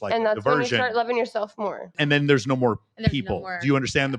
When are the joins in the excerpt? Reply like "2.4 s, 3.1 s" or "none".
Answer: 1.9 s